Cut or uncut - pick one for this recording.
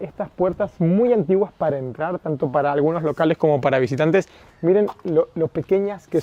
uncut